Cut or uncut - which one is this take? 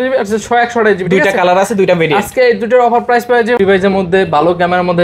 cut